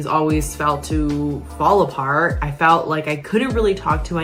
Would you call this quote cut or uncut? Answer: uncut